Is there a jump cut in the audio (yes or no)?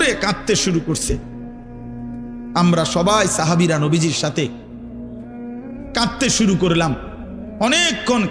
no